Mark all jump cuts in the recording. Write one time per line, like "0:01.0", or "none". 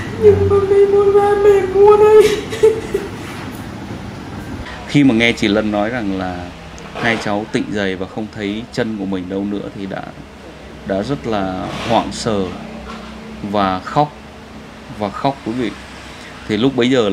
0:04.2